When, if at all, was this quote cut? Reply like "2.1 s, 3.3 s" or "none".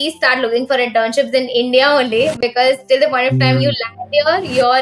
none